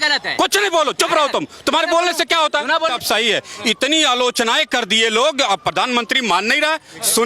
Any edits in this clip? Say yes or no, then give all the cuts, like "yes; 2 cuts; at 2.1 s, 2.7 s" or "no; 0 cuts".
yes; 1 cut; at 2.9 s